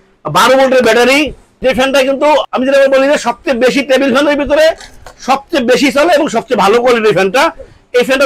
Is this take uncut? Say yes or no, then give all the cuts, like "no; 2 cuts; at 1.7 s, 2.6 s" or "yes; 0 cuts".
yes; 0 cuts